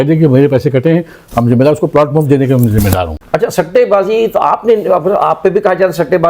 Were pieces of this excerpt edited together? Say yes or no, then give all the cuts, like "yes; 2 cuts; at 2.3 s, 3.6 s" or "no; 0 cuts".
yes; 1 cut; at 3.2 s